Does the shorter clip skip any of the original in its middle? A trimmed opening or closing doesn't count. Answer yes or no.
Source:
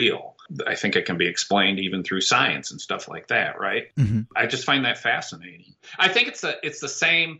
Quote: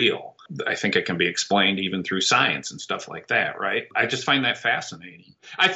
yes